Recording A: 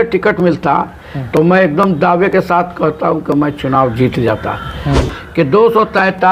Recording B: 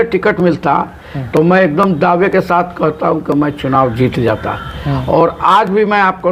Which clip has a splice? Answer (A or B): A